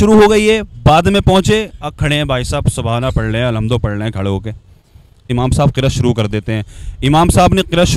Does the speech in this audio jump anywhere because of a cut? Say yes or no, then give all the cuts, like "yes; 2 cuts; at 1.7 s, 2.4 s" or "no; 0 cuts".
yes; 1 cut; at 5.3 s